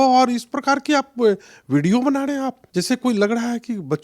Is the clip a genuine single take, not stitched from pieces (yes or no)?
no